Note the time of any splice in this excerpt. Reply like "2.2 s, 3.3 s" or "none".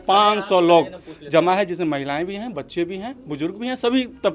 none